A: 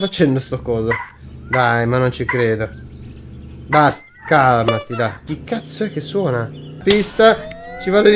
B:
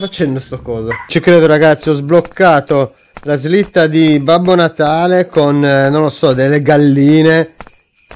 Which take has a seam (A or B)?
B